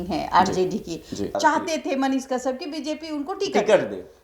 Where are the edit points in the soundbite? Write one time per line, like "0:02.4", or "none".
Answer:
0:01.2